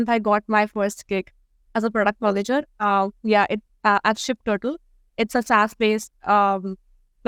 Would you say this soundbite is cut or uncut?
uncut